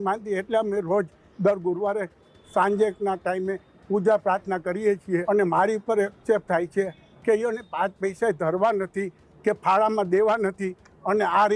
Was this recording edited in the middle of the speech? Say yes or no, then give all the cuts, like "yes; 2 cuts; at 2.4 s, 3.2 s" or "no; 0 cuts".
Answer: yes; 1 cut; at 5.2 s